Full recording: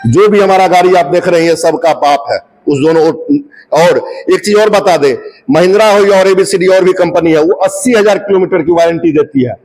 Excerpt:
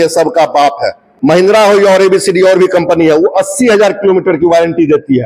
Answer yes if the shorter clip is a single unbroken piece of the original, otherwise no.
no